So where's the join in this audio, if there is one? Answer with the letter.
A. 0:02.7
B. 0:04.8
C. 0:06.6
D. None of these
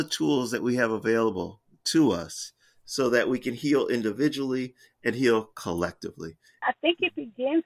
C